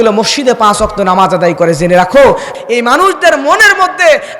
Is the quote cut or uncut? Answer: cut